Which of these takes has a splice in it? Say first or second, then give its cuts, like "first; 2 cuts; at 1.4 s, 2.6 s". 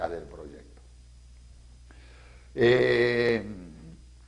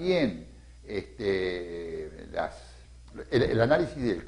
second; 1 cut; at 3.1 s